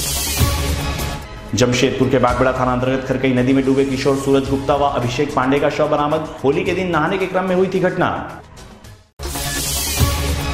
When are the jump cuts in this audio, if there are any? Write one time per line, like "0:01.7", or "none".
0:01.2